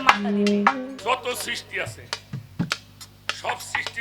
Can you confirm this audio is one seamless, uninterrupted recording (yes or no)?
no